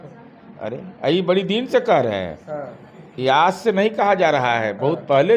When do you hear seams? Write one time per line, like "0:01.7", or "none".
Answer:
none